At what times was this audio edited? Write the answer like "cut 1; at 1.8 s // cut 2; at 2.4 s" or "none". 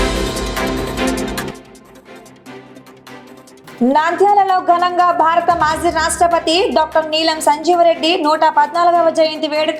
cut 1; at 1.4 s